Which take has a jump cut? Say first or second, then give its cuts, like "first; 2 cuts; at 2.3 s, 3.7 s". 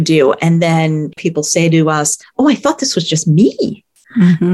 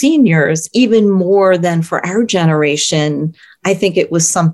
first; 2 cuts; at 1.2 s, 2.2 s